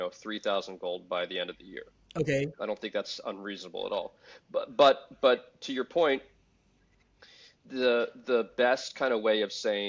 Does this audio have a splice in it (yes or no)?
no